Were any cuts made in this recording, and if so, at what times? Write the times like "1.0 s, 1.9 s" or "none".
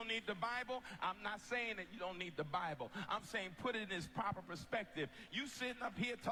none

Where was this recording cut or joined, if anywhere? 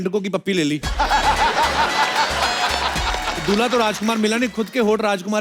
none

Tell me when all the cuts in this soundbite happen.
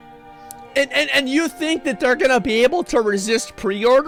none

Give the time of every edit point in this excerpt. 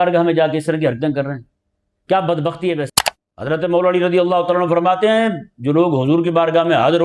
2.9 s

